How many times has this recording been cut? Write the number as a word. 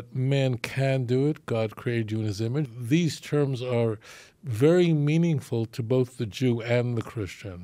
one